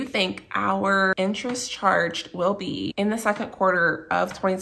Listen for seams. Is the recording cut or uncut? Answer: cut